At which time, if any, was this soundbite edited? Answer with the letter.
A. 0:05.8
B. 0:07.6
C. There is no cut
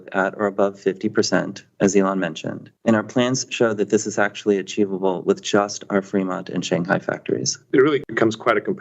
B